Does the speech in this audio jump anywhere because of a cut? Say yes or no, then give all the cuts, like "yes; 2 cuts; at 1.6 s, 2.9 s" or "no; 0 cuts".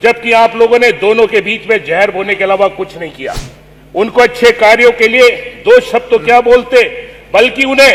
no; 0 cuts